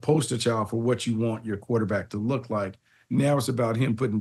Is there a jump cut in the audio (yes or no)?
no